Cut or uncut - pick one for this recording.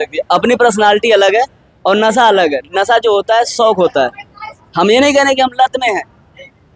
uncut